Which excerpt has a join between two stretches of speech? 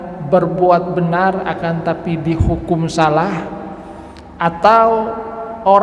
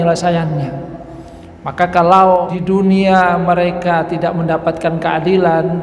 second; 1 cut; at 2.5 s

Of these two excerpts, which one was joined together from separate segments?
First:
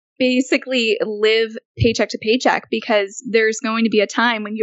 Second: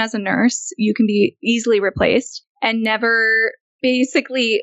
second; 1 cut; at 2.4 s

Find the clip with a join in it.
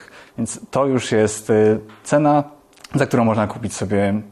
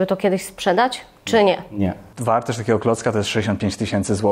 second; 1 cut; at 2.1 s

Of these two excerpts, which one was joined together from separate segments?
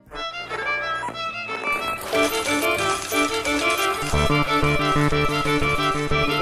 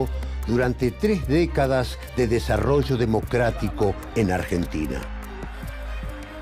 second; 1 cut; at 1.6 s

